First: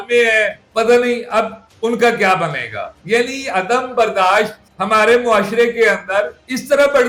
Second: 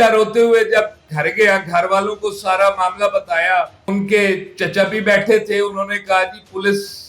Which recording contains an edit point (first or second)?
second